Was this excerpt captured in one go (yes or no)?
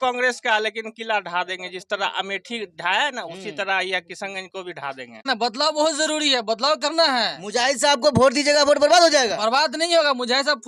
no